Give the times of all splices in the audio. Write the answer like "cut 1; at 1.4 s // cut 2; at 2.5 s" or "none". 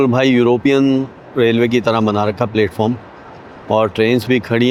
none